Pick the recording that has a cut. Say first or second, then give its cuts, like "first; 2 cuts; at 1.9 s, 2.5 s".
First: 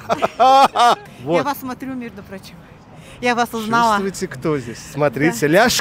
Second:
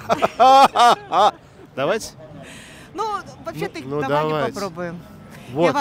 first; 1 cut; at 1.0 s